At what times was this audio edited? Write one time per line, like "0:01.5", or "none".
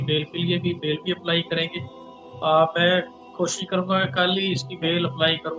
none